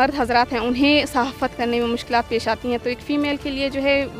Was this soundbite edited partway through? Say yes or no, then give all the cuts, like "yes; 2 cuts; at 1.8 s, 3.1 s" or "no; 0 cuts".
no; 0 cuts